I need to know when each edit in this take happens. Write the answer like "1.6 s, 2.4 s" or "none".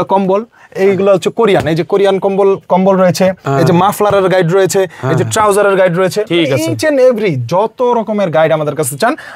none